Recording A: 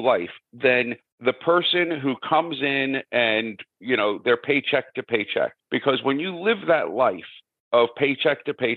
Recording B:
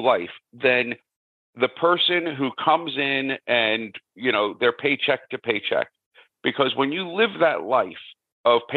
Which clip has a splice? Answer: A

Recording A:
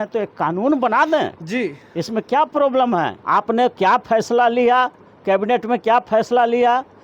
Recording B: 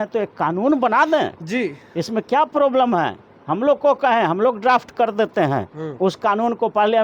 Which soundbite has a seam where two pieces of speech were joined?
A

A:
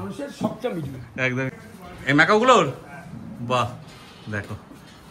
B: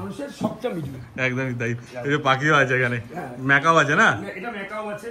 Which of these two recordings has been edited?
A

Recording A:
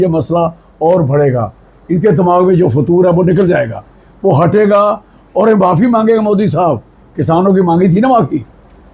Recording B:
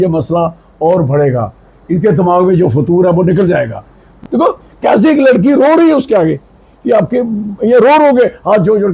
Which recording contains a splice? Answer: B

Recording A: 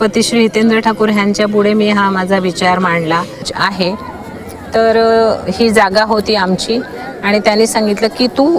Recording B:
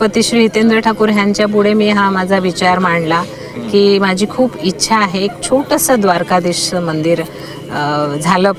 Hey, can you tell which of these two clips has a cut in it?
A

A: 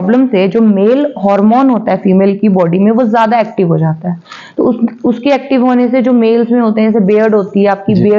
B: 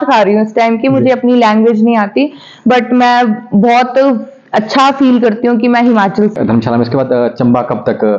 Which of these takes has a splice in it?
B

